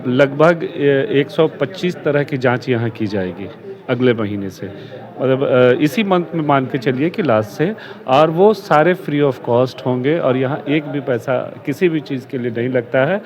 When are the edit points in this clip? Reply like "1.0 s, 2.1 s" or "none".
none